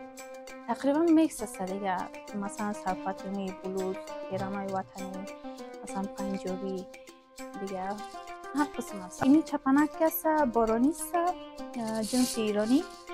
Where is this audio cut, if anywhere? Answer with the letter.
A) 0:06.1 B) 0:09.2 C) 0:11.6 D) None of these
B